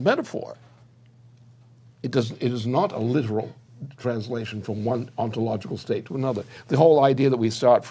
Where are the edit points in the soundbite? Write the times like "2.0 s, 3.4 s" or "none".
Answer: 6.4 s